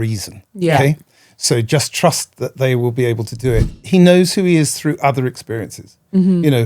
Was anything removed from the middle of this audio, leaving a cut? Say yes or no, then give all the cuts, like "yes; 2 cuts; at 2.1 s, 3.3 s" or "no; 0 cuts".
yes; 1 cut; at 3.7 s